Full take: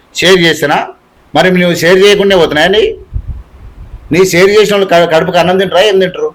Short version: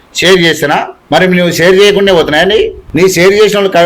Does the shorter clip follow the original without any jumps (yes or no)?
no